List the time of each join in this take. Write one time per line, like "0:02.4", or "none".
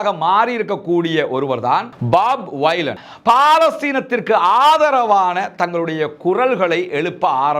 0:03.0